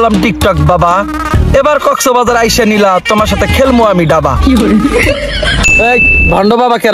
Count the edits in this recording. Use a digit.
1